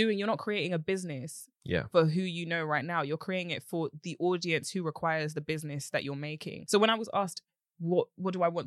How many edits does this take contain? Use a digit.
1